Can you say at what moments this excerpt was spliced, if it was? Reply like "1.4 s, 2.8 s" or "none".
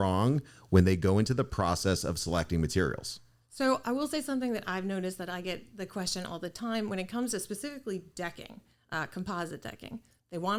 none